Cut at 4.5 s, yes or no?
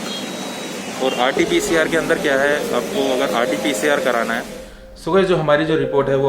yes